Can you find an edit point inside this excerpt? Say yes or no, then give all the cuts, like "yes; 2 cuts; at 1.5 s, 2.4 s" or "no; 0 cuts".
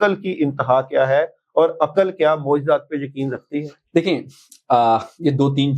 no; 0 cuts